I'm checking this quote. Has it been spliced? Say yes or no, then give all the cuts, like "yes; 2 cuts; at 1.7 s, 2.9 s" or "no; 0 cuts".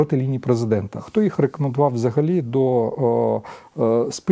yes; 1 cut; at 1.1 s